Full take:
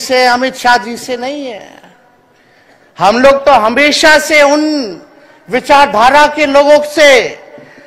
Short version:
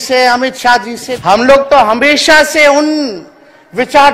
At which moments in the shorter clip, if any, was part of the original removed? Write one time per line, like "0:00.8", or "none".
0:01.1